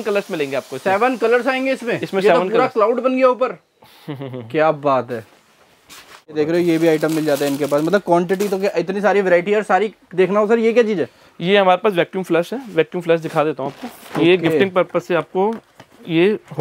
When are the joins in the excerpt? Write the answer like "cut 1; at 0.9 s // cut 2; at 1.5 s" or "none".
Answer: none